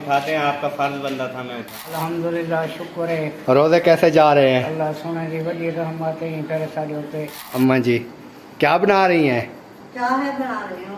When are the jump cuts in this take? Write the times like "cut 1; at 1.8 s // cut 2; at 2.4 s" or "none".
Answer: cut 1; at 1.9 s // cut 2; at 7.4 s